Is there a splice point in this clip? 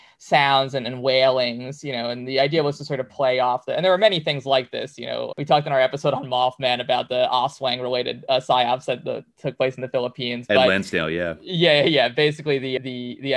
no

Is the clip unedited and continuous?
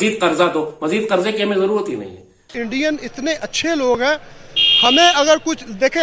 no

